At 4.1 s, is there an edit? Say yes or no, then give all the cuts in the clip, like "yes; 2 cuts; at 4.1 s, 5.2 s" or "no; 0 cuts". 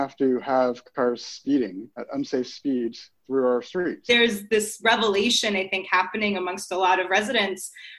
yes; 2 cuts; at 1.9 s, 4.1 s